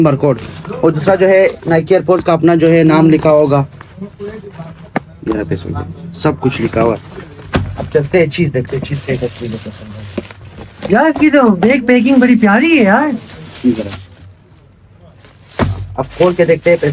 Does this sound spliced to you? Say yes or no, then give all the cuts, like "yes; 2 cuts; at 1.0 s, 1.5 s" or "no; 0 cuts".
no; 0 cuts